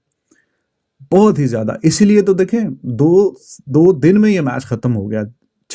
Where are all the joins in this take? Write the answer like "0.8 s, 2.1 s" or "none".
none